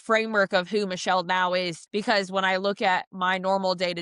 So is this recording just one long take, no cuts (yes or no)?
no